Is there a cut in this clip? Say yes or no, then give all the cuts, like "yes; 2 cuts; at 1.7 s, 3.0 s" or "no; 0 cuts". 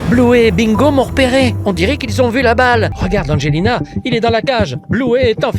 yes; 1 cut; at 3.0 s